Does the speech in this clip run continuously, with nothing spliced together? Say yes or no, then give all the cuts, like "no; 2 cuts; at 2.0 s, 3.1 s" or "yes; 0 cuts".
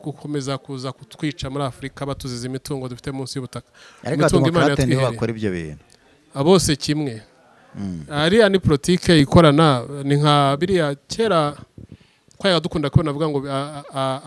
yes; 0 cuts